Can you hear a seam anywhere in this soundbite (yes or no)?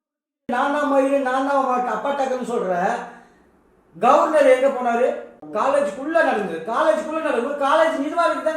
yes